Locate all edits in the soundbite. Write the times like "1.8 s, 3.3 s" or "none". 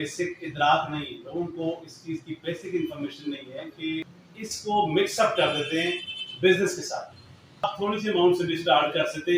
4.2 s, 7.7 s